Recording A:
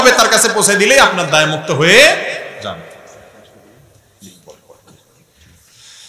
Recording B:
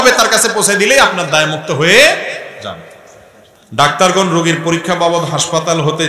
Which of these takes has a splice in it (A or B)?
B